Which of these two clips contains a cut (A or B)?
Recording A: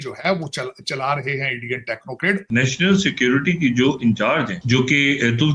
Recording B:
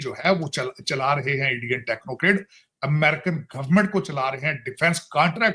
A